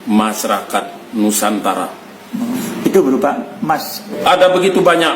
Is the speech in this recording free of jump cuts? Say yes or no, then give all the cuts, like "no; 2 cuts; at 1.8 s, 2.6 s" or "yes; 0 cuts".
no; 2 cuts; at 2.6 s, 4.2 s